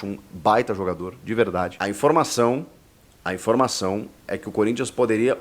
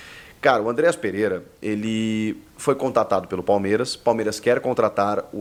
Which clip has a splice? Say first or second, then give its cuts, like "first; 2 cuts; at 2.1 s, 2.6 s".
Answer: first; 1 cut; at 1.8 s